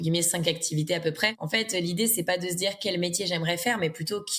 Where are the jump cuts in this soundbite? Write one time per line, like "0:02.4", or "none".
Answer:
0:01.4